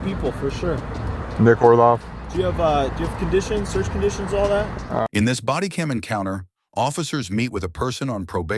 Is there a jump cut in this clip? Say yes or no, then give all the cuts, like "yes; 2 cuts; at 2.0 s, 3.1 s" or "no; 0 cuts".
yes; 1 cut; at 5.0 s